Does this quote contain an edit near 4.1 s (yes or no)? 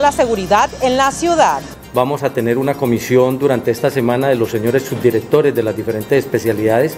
no